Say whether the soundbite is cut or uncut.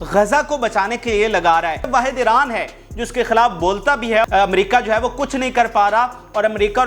cut